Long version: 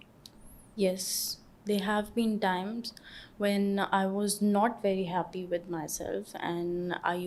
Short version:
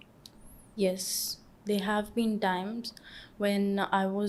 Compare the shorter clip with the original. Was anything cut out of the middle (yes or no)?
no